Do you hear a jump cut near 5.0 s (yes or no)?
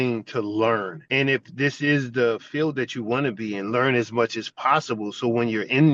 no